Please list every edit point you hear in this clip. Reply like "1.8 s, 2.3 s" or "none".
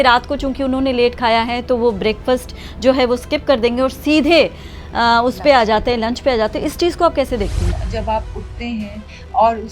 7.8 s

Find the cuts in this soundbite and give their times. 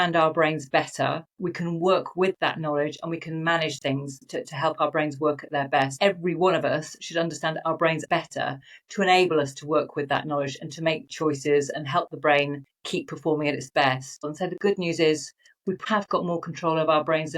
5.9 s, 8.0 s, 14.2 s, 15.8 s

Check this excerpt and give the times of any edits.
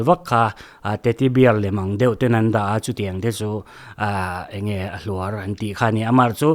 none

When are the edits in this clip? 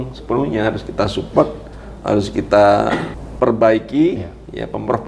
3.2 s

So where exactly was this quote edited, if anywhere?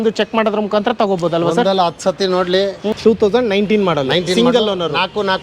2.9 s

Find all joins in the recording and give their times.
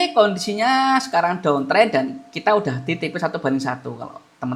none

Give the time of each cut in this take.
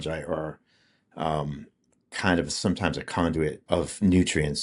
3.6 s

